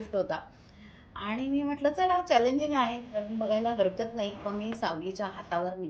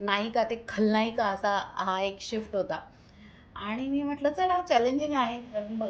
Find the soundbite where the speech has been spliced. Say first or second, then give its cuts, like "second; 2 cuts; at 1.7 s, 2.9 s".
first; 1 cut; at 4.4 s